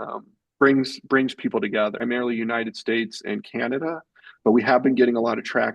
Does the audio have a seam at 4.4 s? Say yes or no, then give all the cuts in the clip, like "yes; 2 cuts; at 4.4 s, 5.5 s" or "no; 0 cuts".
no; 1 cut; at 2.0 s